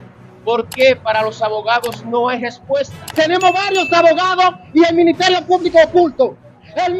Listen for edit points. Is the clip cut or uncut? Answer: cut